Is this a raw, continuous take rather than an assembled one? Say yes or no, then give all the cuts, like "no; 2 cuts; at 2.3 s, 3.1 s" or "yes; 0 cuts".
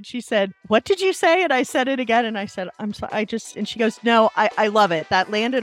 yes; 0 cuts